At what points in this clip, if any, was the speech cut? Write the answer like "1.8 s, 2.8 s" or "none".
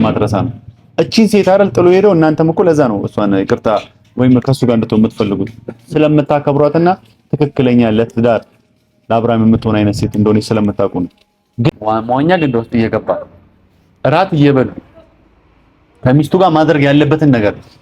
11.8 s